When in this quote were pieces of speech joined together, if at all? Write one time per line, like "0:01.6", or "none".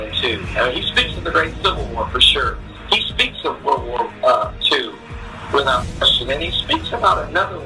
0:06.4